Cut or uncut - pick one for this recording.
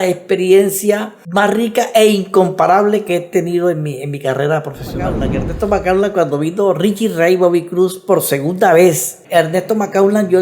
cut